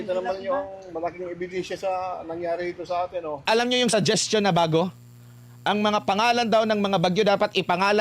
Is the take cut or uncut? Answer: cut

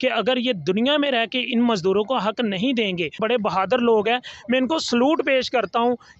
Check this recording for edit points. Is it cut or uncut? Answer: cut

